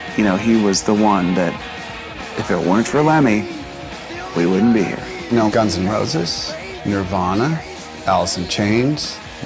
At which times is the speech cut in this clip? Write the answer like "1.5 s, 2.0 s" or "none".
5.4 s